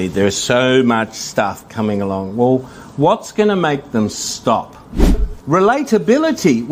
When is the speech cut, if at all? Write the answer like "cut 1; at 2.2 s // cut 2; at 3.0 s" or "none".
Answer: cut 1; at 5.3 s